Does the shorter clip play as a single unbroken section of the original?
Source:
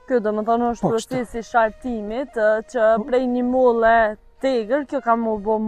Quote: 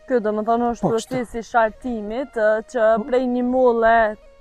yes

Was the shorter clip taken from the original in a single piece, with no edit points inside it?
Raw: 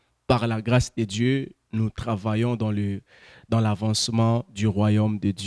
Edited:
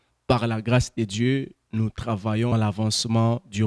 no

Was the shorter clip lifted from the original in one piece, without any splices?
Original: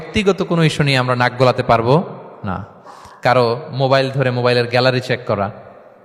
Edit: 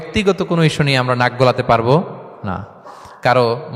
yes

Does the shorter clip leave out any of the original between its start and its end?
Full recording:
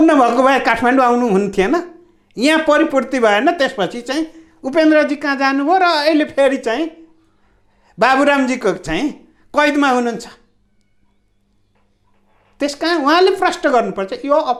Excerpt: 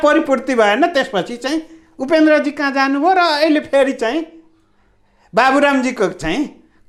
no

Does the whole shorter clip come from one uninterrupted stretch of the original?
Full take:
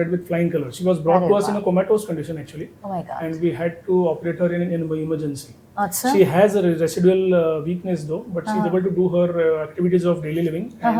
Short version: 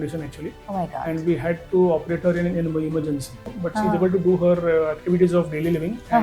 no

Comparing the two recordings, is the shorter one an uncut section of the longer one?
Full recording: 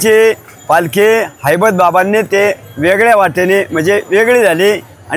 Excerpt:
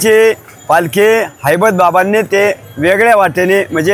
yes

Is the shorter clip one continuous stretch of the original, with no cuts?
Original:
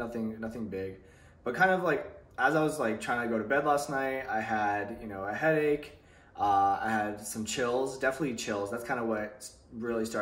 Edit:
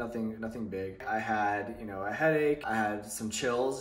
no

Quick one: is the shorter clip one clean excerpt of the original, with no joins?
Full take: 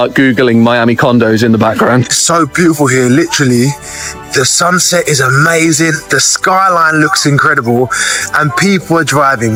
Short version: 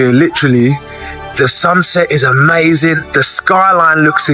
yes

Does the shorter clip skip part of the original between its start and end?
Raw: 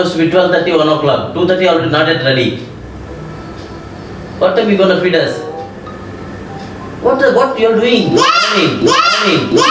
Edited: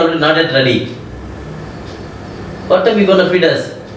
no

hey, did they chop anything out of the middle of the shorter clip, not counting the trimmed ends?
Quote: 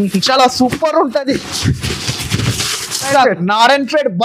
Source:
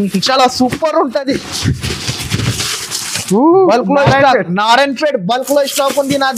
yes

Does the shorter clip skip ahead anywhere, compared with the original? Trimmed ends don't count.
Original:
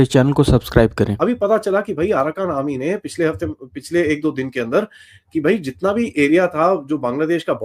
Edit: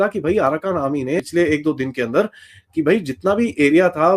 yes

